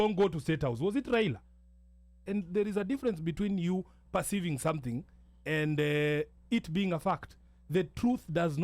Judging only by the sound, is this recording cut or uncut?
cut